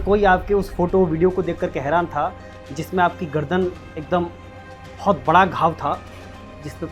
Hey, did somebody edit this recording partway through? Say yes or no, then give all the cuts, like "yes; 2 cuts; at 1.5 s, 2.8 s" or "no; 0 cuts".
no; 0 cuts